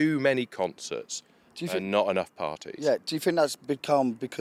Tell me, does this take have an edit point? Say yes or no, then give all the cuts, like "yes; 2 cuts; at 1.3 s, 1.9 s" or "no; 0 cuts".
no; 0 cuts